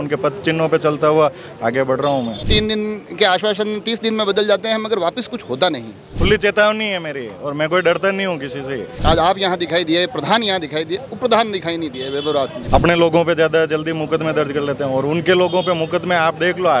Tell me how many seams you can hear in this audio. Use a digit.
4